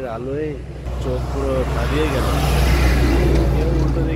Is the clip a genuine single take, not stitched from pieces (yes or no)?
no